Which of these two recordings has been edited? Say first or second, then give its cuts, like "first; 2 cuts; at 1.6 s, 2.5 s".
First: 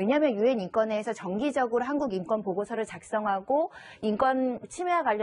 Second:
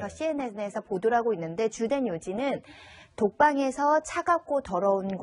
second; 1 cut; at 2.2 s